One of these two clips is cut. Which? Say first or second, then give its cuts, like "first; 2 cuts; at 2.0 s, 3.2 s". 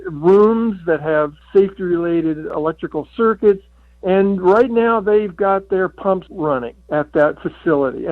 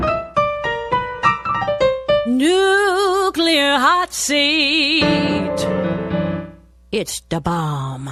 first; 3 cuts; at 1.4 s, 2.5 s, 6.4 s